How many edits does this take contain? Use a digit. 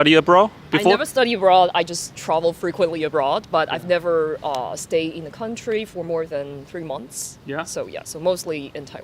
0